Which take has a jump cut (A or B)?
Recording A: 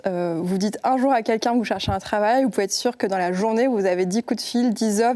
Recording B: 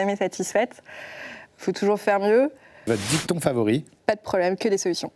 B